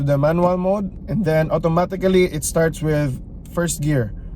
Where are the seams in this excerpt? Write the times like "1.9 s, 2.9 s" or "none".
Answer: 1.0 s